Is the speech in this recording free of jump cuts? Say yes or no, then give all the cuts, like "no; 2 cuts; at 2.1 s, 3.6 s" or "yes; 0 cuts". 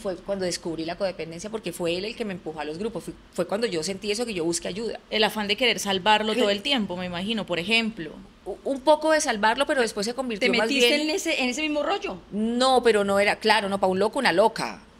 yes; 0 cuts